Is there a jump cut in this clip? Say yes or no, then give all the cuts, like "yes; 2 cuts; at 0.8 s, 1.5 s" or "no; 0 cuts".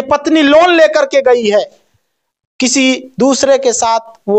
no; 0 cuts